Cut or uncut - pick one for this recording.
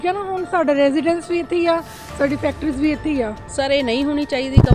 cut